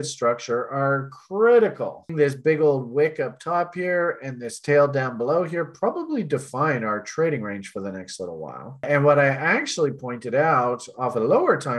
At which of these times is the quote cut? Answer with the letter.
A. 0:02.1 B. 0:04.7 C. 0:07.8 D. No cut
A